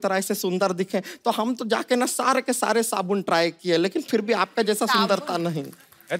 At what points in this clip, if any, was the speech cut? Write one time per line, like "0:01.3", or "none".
none